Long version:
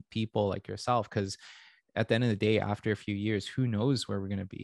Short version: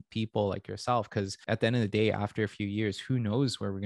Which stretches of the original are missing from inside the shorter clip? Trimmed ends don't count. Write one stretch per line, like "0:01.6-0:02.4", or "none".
0:01.4-0:01.8